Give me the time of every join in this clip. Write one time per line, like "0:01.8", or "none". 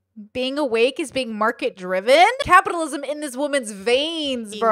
0:02.4